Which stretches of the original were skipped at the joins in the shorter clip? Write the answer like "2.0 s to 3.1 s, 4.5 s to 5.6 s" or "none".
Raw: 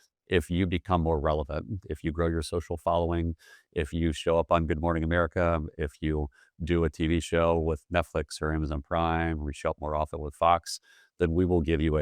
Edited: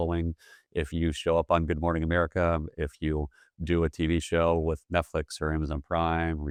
none

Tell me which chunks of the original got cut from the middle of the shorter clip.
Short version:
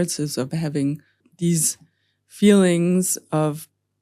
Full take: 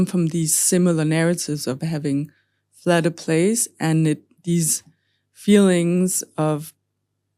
2.6 s to 4.3 s

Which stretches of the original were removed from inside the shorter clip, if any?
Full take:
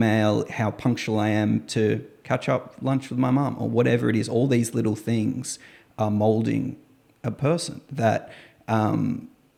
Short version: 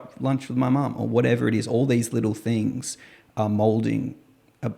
none

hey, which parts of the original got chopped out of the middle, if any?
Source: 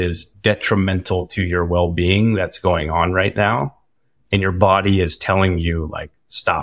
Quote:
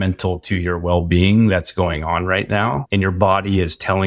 3.7 s to 4.2 s

